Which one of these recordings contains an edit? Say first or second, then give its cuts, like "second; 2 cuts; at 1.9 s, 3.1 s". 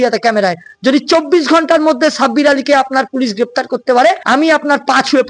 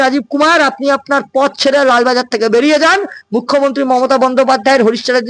first; 1 cut; at 4.2 s